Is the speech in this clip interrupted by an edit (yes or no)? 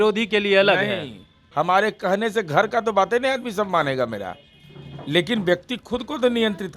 yes